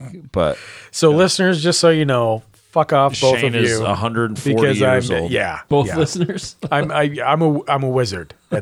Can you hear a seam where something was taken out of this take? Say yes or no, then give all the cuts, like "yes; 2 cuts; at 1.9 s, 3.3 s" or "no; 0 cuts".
no; 0 cuts